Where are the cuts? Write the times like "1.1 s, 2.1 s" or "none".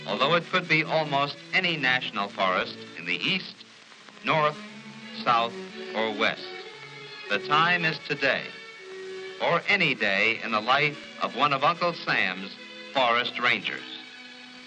5.1 s